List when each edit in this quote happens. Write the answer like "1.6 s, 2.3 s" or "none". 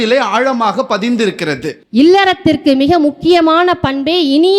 1.8 s